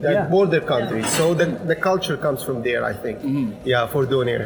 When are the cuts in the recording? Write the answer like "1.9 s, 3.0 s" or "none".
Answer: none